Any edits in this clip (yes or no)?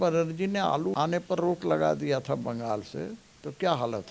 yes